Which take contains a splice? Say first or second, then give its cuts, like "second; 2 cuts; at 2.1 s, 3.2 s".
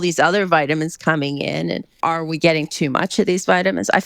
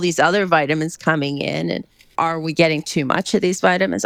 first; 1 cut; at 1.9 s